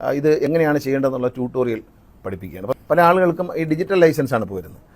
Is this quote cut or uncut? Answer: cut